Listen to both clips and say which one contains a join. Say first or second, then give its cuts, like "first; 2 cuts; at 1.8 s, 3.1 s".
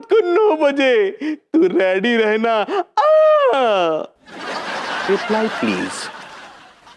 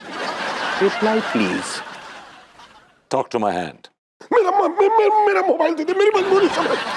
second; 1 cut; at 4.2 s